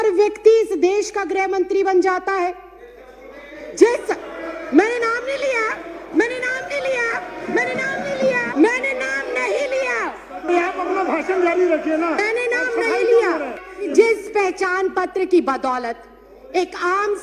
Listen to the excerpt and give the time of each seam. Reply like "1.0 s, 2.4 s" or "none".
8.5 s, 13.9 s